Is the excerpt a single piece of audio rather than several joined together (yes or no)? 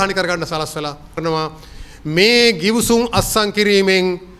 no